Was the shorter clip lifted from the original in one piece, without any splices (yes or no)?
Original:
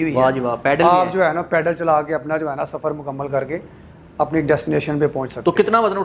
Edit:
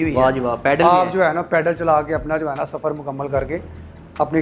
yes